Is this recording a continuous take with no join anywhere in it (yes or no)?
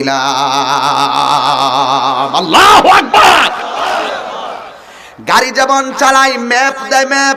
yes